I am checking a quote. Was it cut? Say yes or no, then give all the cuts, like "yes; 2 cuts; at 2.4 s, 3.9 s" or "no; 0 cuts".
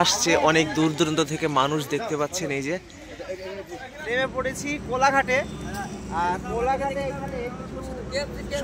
yes; 1 cut; at 4.0 s